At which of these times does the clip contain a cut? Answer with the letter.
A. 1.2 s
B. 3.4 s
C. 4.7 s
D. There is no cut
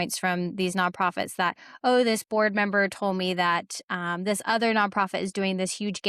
D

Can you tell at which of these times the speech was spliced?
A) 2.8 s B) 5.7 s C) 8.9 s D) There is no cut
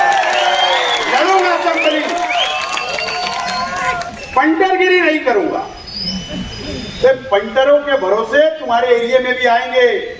D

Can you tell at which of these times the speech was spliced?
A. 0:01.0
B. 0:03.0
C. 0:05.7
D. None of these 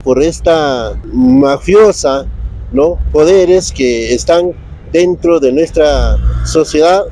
A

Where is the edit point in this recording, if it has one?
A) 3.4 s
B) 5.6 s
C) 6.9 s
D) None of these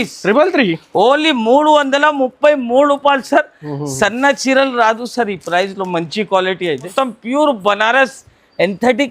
C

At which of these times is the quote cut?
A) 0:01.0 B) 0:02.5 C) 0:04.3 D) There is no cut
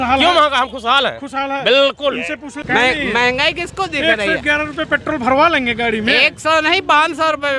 B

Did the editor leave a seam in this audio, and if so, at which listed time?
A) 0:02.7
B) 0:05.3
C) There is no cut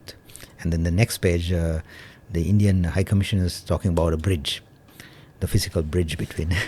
C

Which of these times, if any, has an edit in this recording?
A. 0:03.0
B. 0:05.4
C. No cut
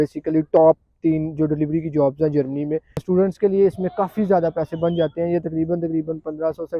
A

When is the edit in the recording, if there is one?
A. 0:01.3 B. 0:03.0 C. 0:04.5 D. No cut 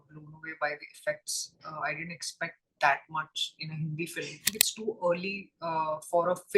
C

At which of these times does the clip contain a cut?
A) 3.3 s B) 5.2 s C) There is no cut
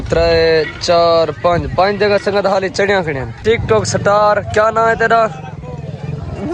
A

